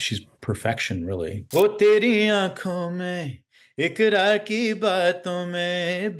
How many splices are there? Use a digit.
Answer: 1